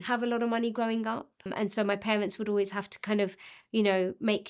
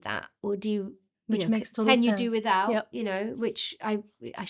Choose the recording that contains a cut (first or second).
first